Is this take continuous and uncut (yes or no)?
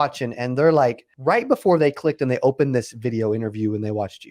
no